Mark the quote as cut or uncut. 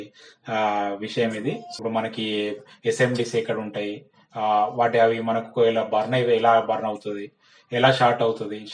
cut